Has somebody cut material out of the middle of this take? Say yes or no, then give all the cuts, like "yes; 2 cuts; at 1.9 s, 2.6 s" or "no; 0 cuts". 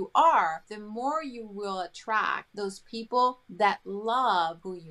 no; 0 cuts